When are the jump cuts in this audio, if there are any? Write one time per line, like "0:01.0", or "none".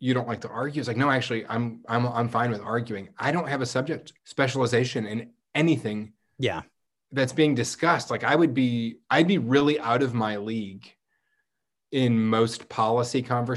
0:04.2